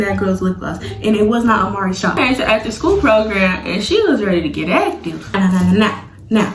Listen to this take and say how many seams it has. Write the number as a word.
two